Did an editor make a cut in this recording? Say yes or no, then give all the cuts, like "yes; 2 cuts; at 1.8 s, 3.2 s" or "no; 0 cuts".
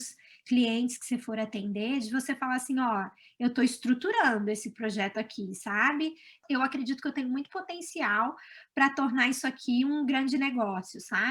yes; 1 cut; at 6.4 s